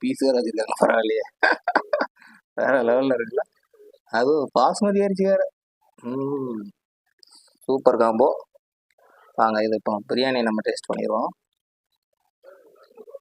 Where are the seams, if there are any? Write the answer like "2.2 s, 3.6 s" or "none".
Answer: 12.1 s